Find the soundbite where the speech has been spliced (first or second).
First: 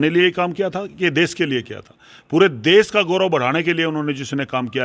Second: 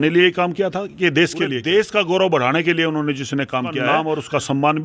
second